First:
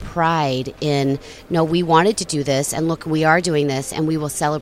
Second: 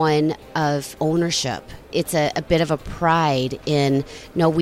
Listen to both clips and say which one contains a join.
second; 2 cuts; at 0.9 s, 1.9 s

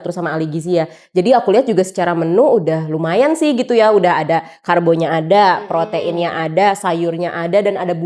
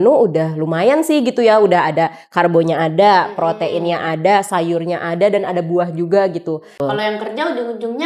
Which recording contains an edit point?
second; 1 cut; at 6.8 s

